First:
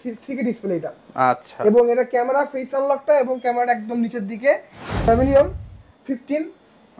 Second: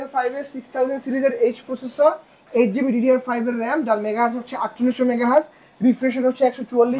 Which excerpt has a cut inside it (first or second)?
first